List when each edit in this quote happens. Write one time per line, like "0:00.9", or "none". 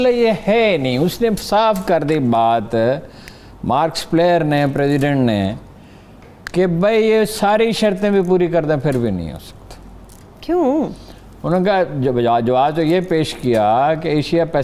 none